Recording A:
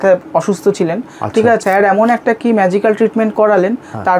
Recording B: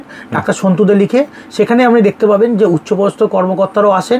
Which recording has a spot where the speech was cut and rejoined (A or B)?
A